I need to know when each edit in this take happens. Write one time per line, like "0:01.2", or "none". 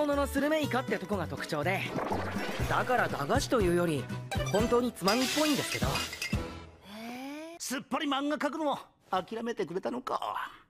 0:01.5